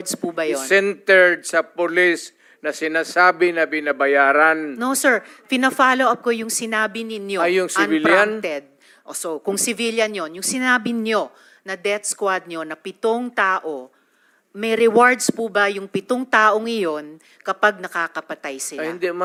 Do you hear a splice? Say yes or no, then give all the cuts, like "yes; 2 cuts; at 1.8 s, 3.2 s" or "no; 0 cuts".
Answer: no; 0 cuts